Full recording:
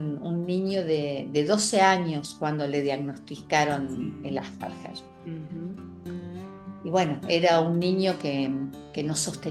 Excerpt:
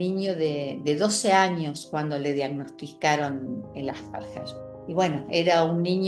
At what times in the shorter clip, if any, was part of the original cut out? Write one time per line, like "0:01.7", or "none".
0:04.7